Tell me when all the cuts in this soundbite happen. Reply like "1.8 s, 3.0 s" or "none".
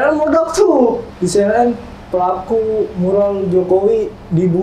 1.1 s